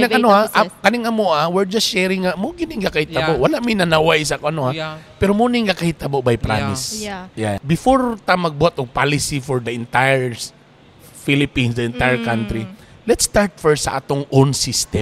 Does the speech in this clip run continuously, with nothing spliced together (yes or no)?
no